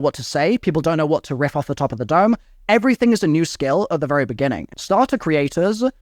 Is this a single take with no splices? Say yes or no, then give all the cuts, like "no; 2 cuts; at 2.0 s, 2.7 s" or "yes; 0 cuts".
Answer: no; 1 cut; at 4.6 s